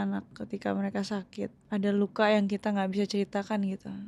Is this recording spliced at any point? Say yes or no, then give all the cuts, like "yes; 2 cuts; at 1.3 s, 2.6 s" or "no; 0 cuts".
yes; 1 cut; at 1.6 s